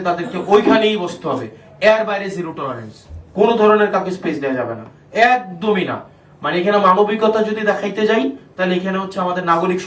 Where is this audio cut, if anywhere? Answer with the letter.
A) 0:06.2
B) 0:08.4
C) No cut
C